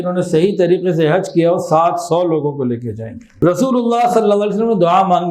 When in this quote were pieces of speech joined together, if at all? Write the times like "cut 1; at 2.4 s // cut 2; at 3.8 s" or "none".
cut 1; at 3.2 s